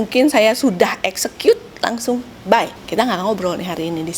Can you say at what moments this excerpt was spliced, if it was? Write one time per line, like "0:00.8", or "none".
0:02.8